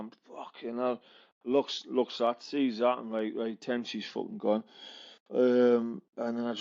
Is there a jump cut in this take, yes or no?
no